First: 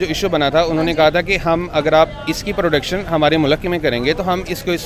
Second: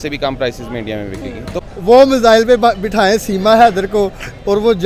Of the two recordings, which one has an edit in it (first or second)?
second